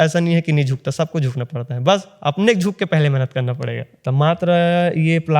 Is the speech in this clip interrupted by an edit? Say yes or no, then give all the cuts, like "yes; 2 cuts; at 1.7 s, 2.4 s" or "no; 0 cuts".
yes; 1 cut; at 4.0 s